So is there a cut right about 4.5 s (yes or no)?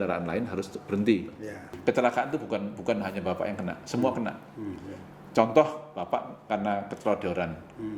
no